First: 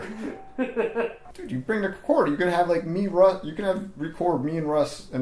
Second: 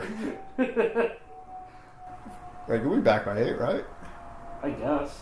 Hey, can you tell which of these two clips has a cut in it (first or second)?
first